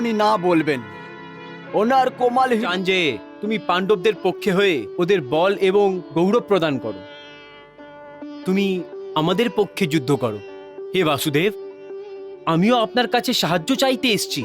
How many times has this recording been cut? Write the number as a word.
one